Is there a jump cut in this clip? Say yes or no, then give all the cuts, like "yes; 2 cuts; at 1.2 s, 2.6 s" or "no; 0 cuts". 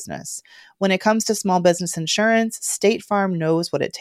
no; 0 cuts